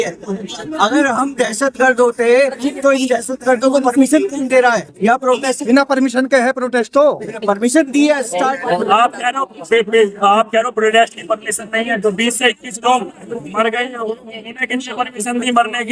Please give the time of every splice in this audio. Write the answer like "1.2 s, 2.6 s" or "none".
8.6 s